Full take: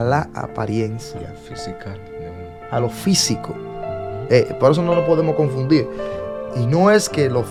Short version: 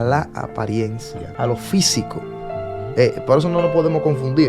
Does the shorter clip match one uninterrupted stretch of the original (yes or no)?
no